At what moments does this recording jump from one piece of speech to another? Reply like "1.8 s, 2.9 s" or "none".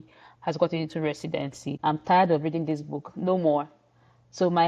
1.7 s